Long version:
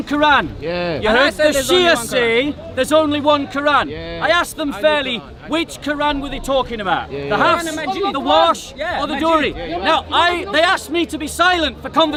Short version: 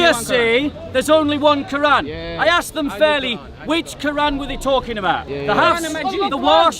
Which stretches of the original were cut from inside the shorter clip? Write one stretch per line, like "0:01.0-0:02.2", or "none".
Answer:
none